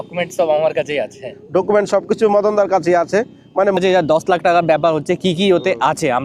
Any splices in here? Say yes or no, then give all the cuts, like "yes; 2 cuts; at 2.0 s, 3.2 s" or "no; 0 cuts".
yes; 1 cut; at 3.8 s